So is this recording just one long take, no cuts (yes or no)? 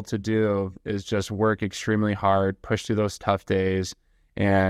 yes